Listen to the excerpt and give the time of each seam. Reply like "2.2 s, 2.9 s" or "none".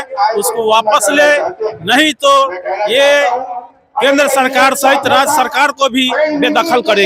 none